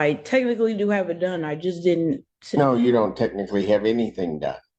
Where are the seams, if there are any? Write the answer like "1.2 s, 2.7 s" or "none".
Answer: none